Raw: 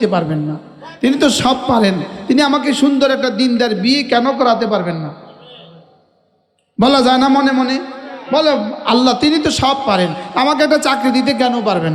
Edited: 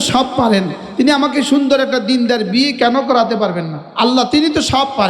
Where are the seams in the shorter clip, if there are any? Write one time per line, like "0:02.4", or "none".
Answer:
0:03.9